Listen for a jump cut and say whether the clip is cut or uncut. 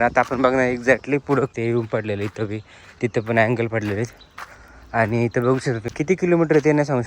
cut